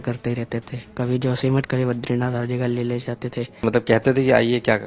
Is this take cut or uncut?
cut